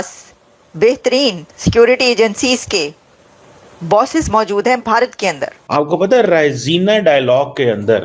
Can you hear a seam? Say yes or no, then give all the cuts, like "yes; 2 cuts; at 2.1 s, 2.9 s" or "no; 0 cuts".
yes; 1 cut; at 5.5 s